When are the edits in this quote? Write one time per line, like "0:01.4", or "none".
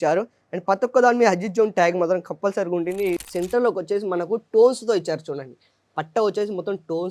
0:03.2